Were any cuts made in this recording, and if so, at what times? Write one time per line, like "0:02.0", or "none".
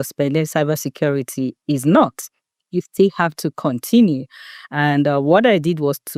none